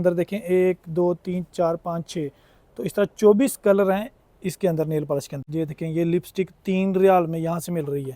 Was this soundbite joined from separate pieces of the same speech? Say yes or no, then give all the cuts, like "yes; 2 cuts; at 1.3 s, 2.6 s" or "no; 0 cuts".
yes; 1 cut; at 5.4 s